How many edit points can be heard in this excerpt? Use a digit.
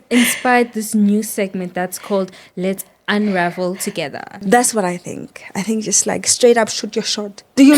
1